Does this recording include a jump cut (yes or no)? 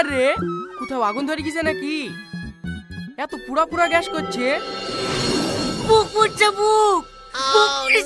no